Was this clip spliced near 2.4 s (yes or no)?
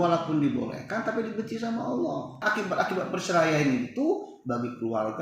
yes